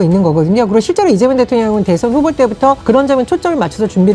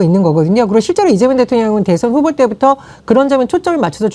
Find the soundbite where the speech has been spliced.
first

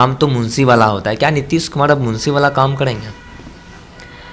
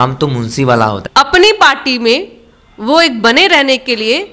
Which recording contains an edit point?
second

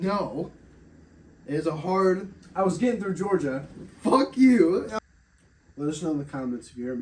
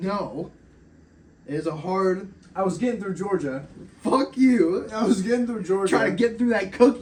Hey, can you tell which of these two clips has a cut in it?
first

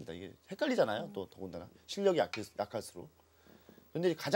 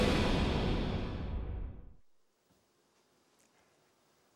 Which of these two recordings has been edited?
first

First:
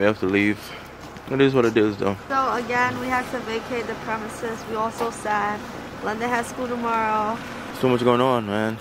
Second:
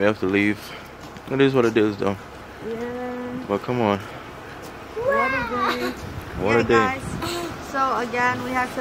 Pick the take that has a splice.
first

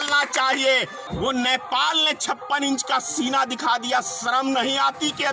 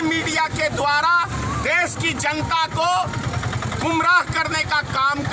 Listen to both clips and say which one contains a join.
first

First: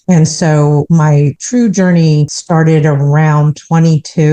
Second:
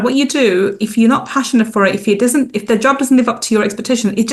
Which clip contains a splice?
first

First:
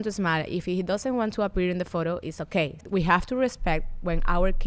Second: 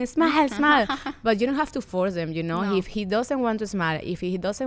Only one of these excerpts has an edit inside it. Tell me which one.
first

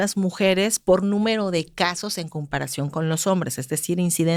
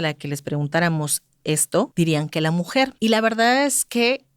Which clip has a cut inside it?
second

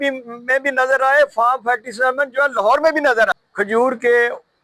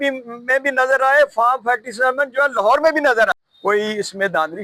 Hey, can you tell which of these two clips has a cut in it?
first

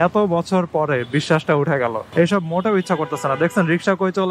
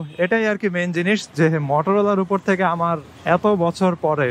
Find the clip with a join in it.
first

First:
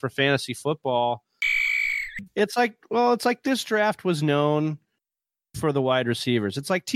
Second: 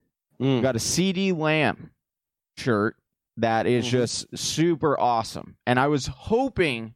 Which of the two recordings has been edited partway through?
first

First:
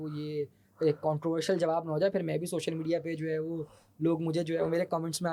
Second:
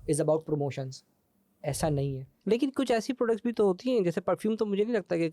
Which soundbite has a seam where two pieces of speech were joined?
second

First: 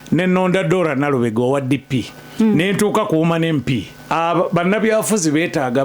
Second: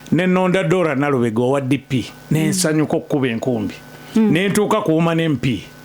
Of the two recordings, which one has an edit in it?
first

